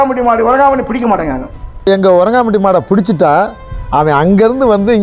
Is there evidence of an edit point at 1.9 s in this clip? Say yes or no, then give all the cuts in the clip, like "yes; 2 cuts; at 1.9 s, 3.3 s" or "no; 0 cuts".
yes; 1 cut; at 1.9 s